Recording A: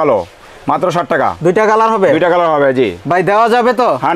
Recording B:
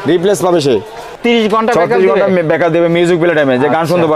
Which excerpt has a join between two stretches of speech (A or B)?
B